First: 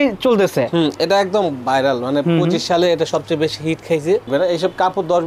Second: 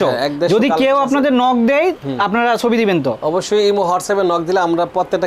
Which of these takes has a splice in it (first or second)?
first